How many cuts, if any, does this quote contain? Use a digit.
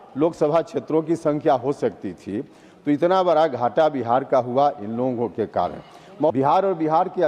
1